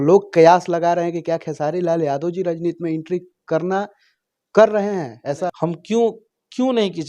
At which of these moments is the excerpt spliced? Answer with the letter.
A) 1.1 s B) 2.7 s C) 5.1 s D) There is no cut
C